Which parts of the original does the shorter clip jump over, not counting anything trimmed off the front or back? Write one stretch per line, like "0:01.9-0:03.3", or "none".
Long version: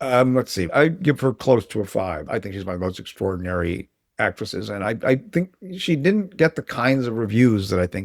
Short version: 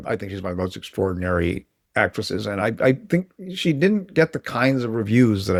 none